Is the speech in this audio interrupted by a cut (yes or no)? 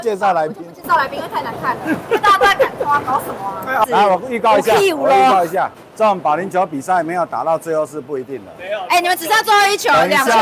yes